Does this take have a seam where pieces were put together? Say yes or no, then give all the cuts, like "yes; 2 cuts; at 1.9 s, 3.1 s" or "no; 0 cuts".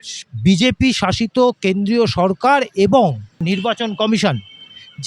yes; 1 cut; at 3.4 s